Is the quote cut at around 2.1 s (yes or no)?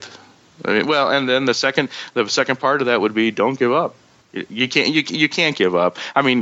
no